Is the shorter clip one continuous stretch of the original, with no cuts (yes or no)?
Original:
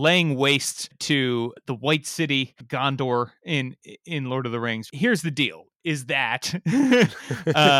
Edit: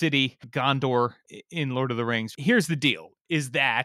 no